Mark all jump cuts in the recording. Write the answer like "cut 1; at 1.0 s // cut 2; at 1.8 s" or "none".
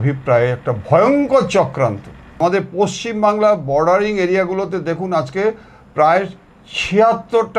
cut 1; at 2.4 s

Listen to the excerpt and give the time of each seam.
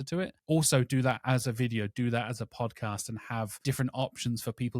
cut 1; at 3.6 s

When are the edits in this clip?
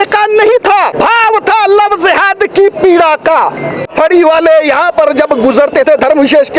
cut 1; at 0.9 s // cut 2; at 3.9 s

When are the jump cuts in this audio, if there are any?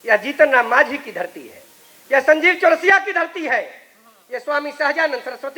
none

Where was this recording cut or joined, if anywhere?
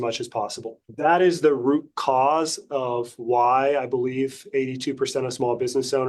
none

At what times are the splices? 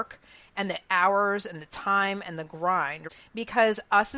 cut 1; at 3.0 s

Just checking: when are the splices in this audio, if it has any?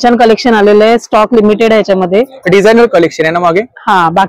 none

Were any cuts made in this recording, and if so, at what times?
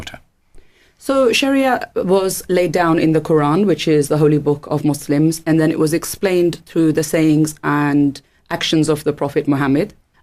cut 1; at 8.6 s

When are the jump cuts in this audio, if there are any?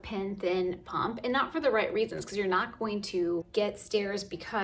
cut 1; at 3.5 s

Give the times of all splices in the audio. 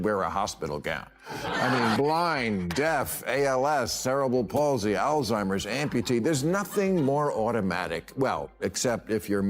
cut 1; at 2.0 s

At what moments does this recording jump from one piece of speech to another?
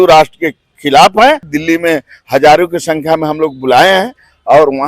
cut 1; at 1.5 s

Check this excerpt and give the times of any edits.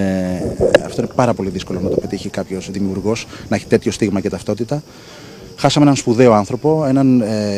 none

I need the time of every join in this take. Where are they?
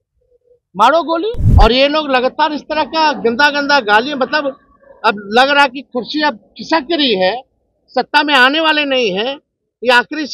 cut 1; at 1.4 s

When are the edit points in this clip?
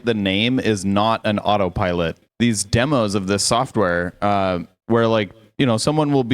cut 1; at 2.2 s

